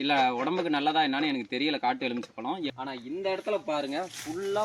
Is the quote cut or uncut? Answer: cut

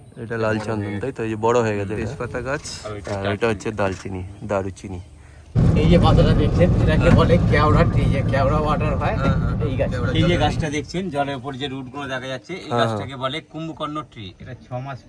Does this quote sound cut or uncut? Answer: cut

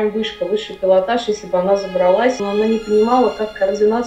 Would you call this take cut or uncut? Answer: cut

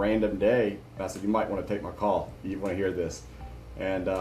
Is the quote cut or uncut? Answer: cut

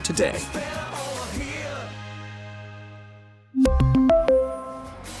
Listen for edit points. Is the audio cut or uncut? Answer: uncut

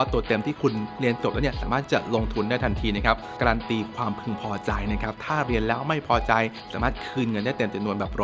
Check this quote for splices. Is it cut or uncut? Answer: cut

